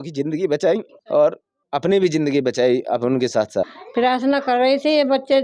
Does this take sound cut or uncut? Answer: cut